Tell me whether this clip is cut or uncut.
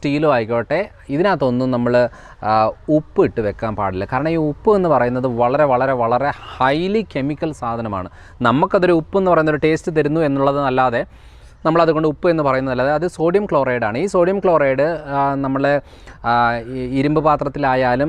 uncut